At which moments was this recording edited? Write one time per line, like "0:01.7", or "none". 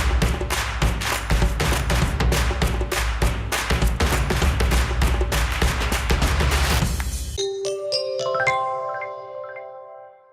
0:07.2